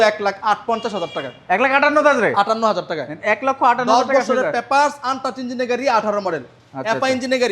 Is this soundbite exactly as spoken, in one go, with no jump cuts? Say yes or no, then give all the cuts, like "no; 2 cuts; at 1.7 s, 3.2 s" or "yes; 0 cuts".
yes; 0 cuts